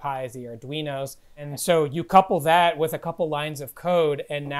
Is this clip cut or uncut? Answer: cut